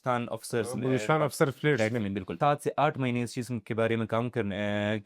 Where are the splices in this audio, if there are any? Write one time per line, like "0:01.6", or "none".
0:02.2